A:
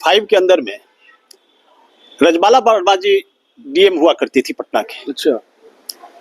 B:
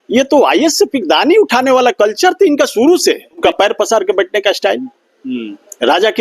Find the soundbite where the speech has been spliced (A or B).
B